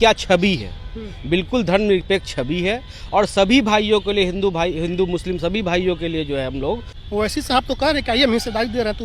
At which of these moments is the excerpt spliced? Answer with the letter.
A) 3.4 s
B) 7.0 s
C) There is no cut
B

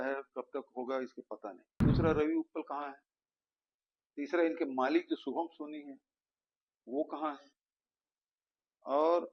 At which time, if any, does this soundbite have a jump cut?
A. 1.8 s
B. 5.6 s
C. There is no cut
A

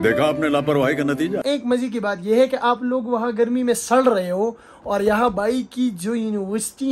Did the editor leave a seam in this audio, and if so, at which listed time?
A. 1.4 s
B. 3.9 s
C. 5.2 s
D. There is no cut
A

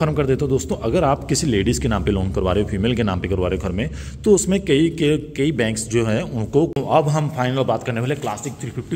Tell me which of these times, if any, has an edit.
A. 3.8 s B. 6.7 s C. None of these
B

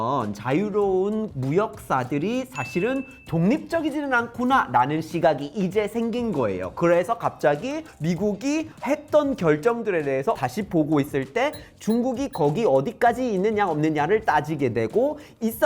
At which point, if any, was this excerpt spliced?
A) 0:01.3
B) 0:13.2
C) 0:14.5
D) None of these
A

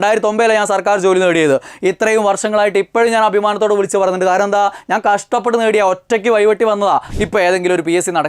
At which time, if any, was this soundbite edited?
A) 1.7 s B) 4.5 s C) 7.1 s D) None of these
C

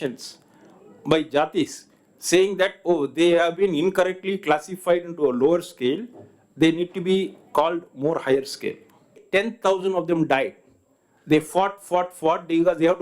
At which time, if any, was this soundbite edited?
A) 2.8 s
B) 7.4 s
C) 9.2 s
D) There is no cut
C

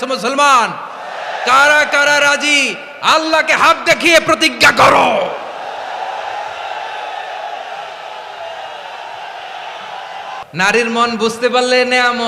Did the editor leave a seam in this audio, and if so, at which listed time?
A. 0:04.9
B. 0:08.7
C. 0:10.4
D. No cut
C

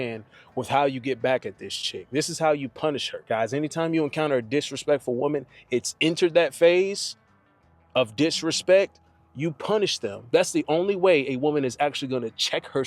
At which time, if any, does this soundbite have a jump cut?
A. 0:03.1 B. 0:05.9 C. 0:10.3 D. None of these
C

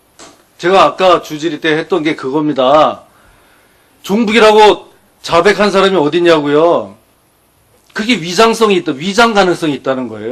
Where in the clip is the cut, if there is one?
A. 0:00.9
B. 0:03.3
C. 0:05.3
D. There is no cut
A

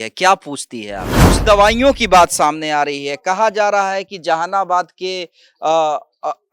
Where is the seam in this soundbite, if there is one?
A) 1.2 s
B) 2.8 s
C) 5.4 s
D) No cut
A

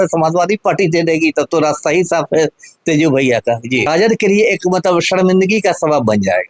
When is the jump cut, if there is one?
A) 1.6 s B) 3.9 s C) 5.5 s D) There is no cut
B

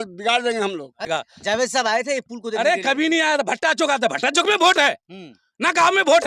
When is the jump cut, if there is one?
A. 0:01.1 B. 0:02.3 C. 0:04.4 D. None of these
A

